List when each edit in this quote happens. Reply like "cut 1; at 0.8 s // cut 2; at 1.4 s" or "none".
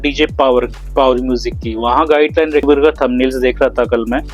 cut 1; at 2.6 s